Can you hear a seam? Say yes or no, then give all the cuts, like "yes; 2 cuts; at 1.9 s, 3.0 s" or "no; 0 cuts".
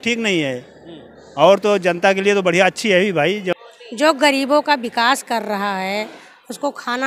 yes; 1 cut; at 3.5 s